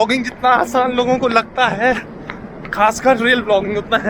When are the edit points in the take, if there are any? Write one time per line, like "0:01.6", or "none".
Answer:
none